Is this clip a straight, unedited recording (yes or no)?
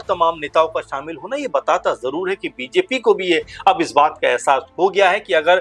yes